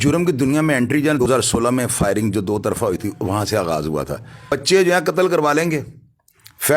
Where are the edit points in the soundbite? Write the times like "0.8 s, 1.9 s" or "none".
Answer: 1.2 s, 4.5 s

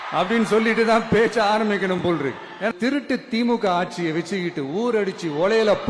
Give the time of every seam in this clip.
2.7 s

